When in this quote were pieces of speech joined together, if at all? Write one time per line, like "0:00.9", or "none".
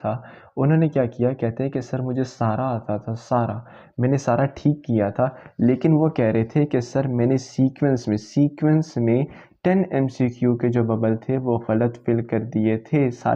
none